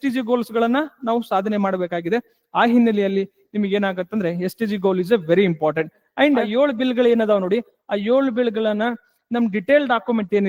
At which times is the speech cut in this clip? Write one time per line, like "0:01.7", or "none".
0:06.5